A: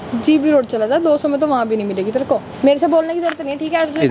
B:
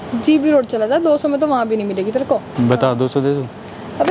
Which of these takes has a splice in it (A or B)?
A